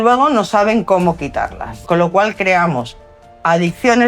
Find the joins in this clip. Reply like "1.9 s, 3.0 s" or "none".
1.7 s